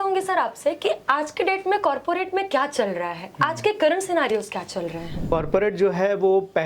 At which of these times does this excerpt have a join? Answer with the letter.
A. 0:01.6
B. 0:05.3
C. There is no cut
B